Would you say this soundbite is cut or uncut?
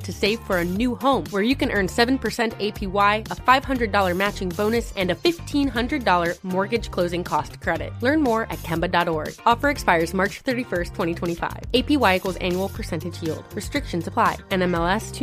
uncut